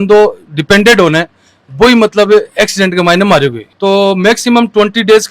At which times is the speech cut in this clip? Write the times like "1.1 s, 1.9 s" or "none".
3.7 s